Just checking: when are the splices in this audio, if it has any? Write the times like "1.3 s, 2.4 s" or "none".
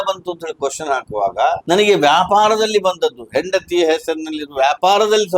1.6 s